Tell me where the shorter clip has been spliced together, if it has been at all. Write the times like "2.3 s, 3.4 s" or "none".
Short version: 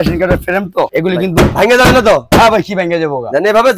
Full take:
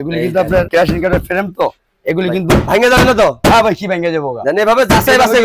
0.9 s